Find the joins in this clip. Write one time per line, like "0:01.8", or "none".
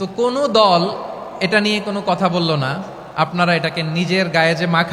none